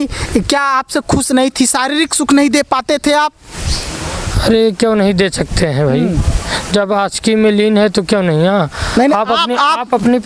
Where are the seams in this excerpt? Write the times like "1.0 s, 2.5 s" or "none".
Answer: none